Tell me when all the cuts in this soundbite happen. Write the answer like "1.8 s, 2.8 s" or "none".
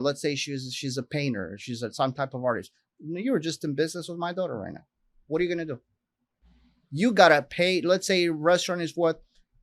none

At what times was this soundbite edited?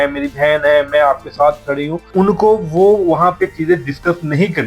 2.0 s

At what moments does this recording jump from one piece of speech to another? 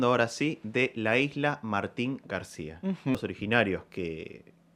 3.1 s

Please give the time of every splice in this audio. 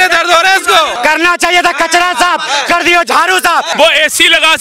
0.9 s, 3.7 s

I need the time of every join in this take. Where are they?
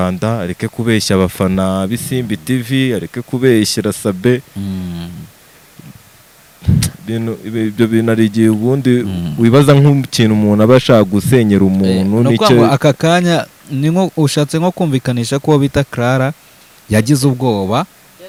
none

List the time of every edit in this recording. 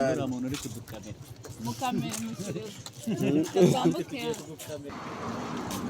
4.9 s

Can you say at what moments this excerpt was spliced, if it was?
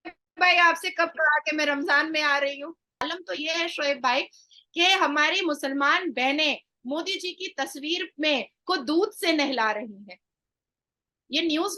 3.1 s

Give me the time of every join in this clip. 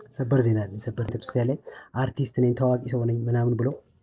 1.1 s

